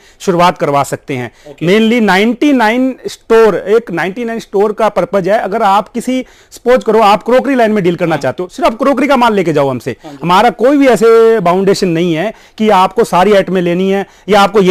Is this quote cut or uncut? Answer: uncut